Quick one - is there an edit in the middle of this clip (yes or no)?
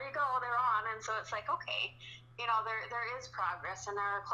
no